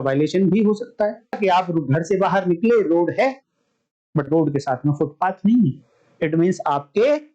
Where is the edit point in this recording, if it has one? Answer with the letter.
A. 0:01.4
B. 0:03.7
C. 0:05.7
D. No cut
A